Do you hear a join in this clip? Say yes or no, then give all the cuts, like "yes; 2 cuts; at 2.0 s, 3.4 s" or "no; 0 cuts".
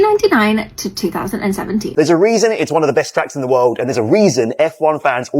yes; 1 cut; at 1.9 s